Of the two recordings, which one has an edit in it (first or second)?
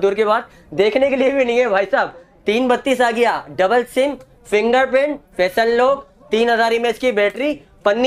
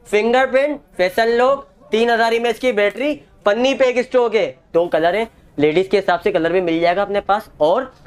second